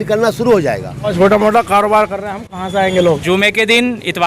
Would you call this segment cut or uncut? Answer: cut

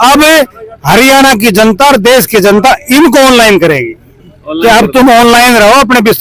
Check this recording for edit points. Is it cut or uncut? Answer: uncut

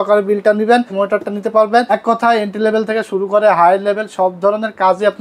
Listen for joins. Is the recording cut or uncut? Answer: cut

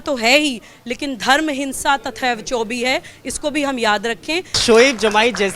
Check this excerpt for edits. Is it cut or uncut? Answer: cut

